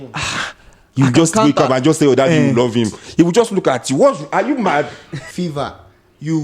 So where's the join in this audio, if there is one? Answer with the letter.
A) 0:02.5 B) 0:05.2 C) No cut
B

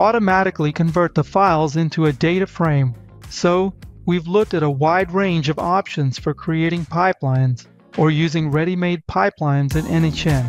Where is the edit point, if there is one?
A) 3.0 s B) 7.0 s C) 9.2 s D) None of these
A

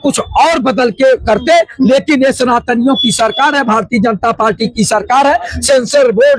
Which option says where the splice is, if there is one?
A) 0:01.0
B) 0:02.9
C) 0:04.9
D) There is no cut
D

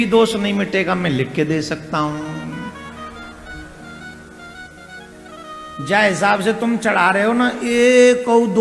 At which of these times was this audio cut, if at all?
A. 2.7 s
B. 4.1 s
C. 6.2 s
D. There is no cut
D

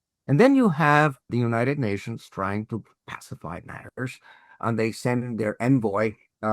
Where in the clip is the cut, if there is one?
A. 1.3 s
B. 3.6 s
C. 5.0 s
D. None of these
A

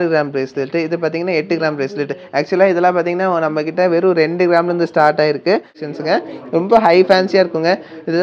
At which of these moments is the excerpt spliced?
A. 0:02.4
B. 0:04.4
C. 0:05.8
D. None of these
C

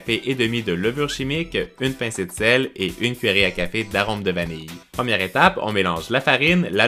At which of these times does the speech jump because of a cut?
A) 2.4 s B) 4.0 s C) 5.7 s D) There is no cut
D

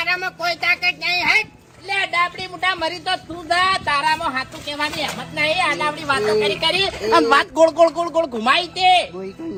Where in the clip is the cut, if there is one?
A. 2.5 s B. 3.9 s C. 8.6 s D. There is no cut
D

